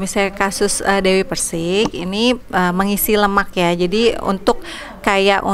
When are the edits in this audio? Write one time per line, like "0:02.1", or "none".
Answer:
none